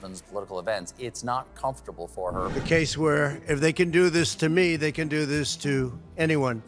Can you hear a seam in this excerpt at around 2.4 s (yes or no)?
yes